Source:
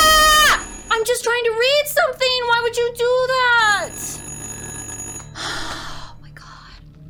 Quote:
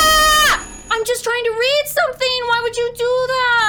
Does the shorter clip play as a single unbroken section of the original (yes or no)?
yes